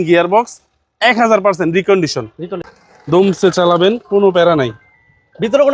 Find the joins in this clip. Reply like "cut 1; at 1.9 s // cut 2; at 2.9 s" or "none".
cut 1; at 2.6 s

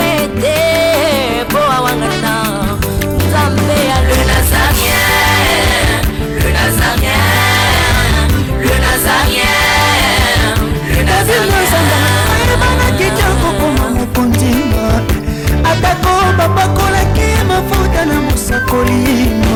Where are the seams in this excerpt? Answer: none

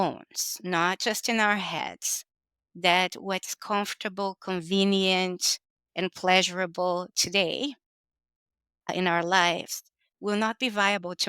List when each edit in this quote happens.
cut 1; at 8.9 s

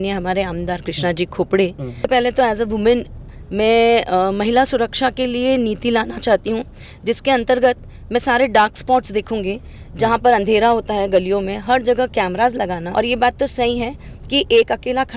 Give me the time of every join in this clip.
cut 1; at 2.1 s // cut 2; at 12.8 s

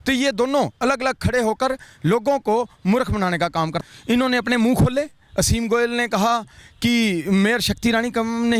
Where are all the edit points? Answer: cut 1; at 3.8 s

